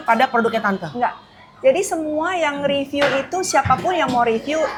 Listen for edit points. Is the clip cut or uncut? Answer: uncut